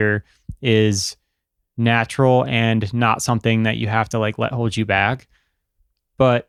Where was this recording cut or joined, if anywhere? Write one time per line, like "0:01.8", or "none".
none